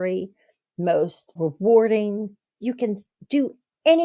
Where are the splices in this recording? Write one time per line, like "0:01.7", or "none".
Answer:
0:01.3
0:02.5